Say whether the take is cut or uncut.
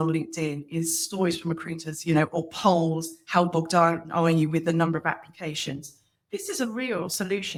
uncut